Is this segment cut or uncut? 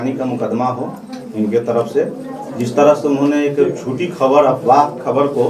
uncut